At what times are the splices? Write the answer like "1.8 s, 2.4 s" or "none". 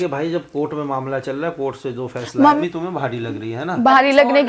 2.6 s